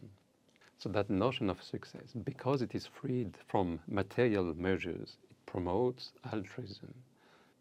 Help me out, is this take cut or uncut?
uncut